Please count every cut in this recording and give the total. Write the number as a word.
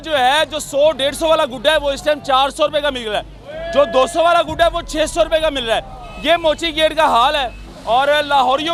zero